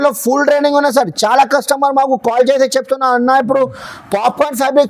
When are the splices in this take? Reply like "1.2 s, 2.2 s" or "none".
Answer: none